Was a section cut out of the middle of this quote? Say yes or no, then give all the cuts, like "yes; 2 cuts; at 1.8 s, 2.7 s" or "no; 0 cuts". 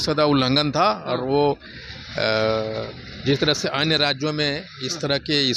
no; 0 cuts